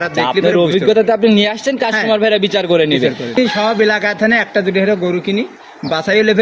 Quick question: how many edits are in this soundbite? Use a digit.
1